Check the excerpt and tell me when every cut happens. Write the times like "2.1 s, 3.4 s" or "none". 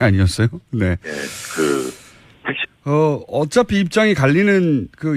none